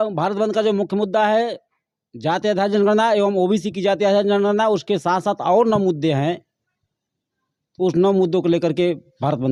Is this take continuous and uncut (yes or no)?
yes